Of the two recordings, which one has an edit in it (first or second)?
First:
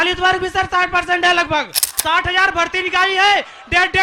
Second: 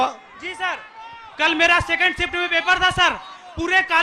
first